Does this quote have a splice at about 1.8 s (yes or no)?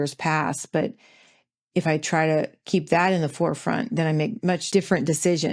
no